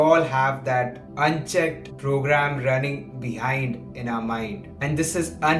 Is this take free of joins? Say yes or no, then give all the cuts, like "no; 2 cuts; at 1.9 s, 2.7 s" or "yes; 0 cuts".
no; 3 cuts; at 1.0 s, 1.9 s, 4.7 s